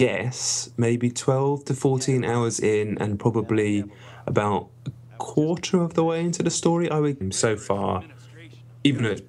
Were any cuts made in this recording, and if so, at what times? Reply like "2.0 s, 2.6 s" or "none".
none